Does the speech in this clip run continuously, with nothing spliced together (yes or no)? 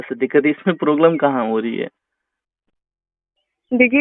yes